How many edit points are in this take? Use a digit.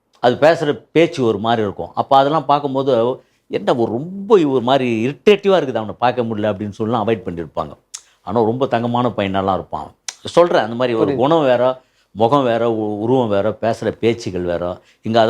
0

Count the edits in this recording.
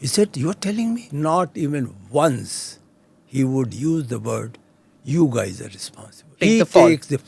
2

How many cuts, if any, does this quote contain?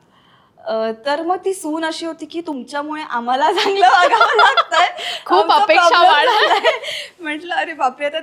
0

